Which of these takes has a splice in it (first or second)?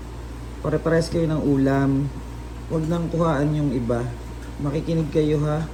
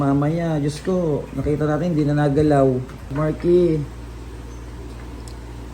second